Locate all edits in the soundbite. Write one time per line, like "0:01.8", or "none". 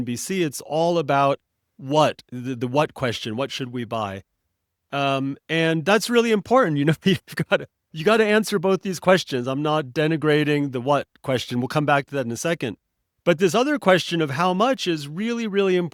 none